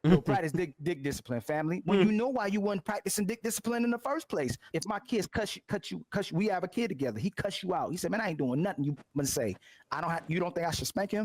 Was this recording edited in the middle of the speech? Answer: yes; 1 cut; at 4.7 s

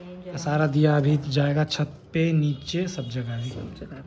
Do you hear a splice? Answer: no; 0 cuts

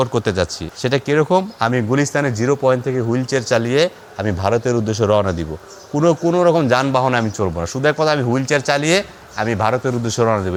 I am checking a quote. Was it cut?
no; 0 cuts

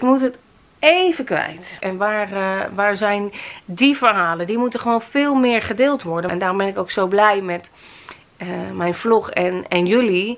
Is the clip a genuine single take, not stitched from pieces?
no; 2 cuts; at 1.8 s, 6.3 s

